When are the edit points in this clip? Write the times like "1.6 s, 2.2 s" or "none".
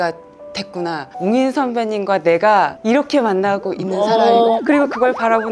2.8 s, 4.6 s